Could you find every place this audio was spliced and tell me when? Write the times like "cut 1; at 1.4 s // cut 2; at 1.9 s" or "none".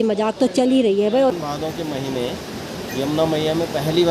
cut 1; at 1.3 s